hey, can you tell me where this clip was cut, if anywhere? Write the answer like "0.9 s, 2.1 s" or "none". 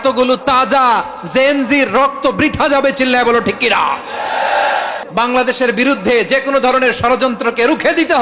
5.0 s